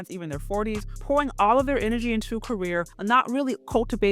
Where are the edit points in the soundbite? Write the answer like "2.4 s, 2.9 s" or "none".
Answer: 0.9 s, 2.9 s